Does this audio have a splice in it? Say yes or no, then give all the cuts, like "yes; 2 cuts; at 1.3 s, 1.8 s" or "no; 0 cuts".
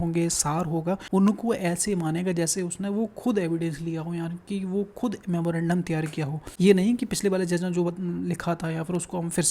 yes; 2 cuts; at 1.0 s, 6.4 s